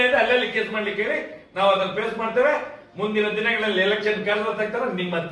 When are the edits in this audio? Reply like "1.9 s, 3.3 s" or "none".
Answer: none